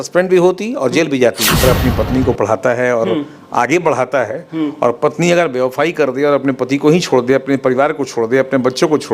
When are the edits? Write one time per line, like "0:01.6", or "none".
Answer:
0:01.6

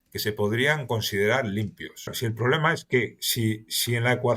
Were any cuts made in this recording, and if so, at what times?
0:02.1

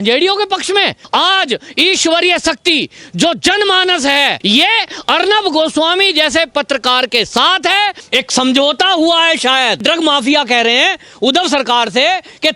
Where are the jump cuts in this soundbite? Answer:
0:01.0
0:04.4
0:08.0
0:09.8

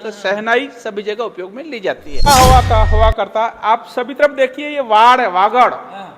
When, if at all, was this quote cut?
0:02.2

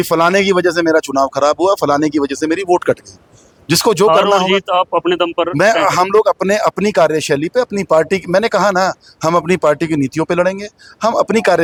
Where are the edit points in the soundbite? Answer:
none

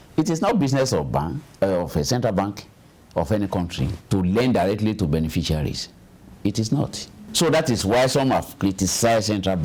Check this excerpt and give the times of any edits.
none

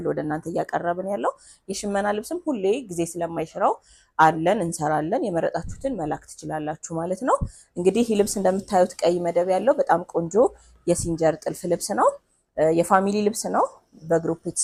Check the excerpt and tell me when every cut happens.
none

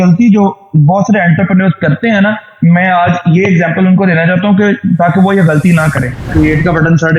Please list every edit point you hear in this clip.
0:06.3

